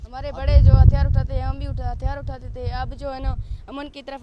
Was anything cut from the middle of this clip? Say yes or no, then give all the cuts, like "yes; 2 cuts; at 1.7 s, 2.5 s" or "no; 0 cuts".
no; 0 cuts